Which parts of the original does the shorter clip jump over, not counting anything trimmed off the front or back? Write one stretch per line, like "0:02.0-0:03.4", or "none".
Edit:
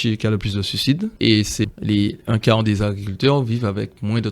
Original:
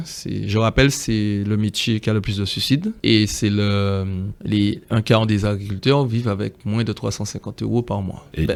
0:03.5-0:04.3